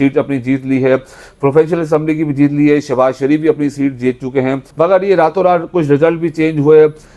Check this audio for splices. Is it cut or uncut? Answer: cut